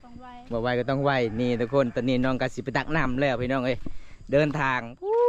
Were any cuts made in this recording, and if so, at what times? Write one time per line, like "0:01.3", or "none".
none